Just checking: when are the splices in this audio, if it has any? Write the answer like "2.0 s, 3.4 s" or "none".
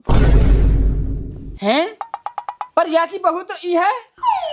none